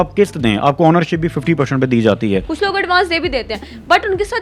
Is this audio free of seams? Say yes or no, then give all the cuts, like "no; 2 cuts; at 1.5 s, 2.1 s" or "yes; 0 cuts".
no; 1 cut; at 2.5 s